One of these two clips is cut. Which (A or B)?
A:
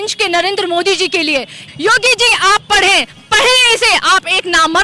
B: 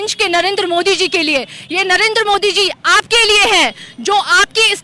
A